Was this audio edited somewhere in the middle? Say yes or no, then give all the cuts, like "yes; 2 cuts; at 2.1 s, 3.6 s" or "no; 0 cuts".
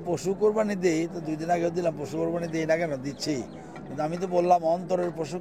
no; 0 cuts